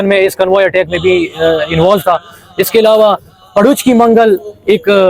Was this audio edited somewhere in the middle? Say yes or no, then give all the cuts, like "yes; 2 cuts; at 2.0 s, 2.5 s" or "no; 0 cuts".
no; 0 cuts